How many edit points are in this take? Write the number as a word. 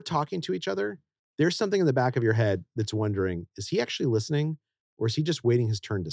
zero